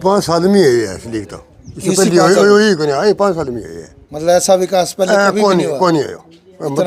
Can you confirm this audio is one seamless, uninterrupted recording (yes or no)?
yes